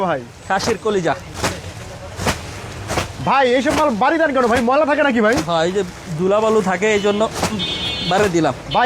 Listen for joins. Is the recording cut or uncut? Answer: uncut